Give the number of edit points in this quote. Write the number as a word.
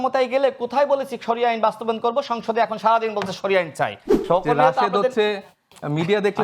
one